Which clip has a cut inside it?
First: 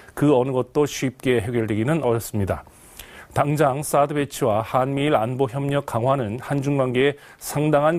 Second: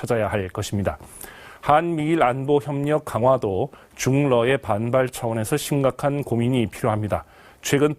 second; 1 cut; at 1.9 s

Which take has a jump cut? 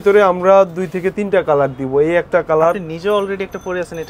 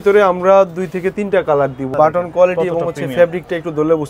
second; 1 cut; at 1.8 s

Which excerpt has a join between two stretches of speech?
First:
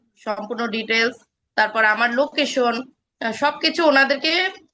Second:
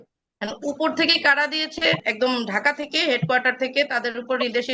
second; 1 cut; at 2.0 s

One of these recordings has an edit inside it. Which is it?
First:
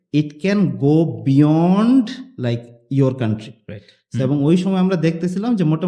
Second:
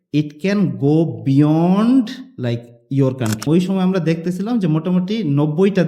second; 1 cut; at 3.5 s

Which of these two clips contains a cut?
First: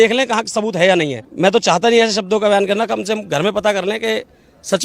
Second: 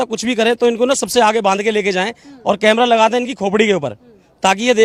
first; 1 cut; at 1.2 s

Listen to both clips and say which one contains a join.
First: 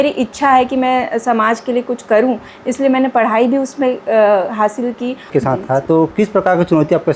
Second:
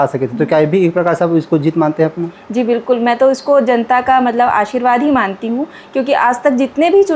first; 1 cut; at 5.3 s

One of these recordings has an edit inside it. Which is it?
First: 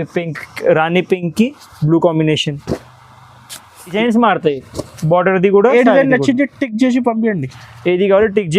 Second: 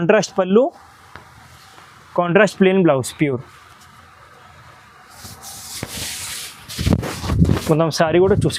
first; 1 cut; at 3.9 s

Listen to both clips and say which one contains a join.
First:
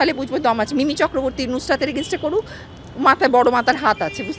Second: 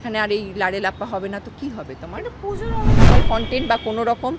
second; 1 cut; at 3.0 s

